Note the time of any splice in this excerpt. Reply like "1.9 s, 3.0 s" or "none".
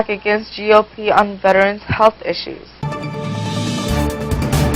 none